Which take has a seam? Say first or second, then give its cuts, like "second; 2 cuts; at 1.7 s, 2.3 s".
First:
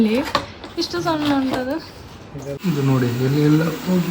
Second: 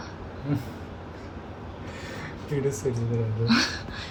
first; 1 cut; at 2.5 s